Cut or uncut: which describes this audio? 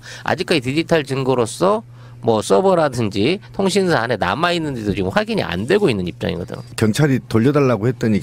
uncut